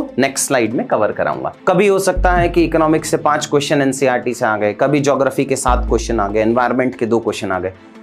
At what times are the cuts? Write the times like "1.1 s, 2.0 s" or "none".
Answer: 1.5 s